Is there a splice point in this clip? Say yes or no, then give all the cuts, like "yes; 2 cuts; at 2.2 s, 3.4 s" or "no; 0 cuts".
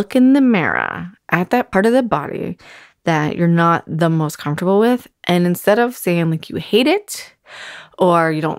yes; 1 cut; at 1.7 s